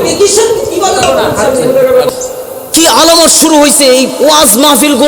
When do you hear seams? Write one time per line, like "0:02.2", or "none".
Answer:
none